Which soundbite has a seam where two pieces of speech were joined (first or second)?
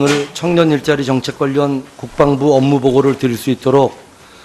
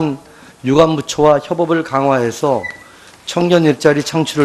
second